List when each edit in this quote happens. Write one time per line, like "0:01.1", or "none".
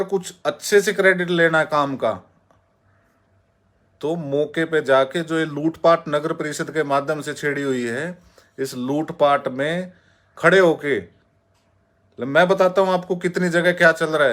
none